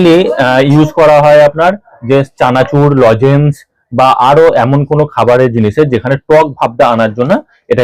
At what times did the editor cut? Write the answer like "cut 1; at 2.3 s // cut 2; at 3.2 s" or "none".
none